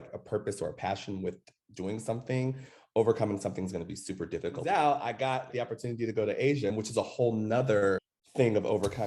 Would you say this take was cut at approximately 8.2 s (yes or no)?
yes